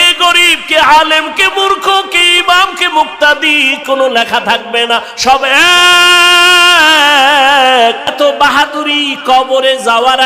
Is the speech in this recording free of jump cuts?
no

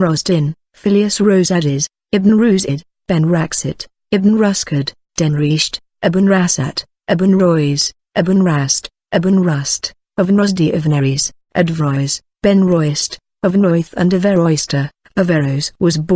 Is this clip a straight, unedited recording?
no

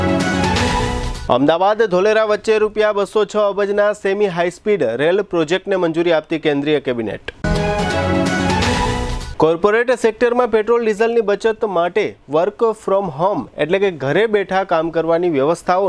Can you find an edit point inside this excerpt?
yes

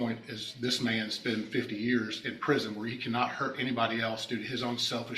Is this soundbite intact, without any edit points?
yes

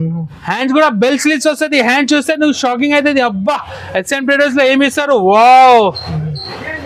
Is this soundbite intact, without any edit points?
yes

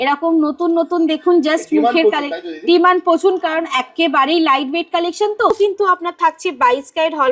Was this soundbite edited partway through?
yes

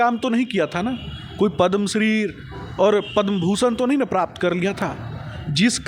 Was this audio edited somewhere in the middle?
no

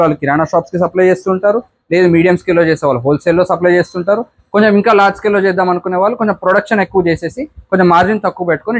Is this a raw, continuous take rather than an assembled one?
yes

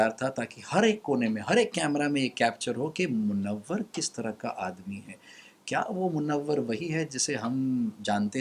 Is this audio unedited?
yes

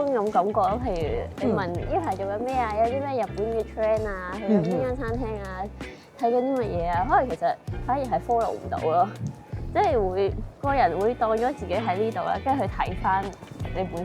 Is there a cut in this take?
no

